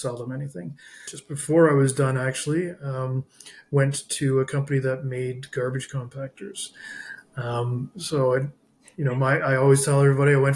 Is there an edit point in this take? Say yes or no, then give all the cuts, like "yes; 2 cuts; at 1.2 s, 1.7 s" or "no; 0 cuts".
yes; 1 cut; at 1.1 s